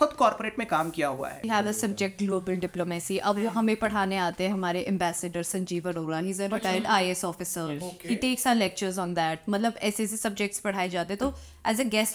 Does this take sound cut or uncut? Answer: cut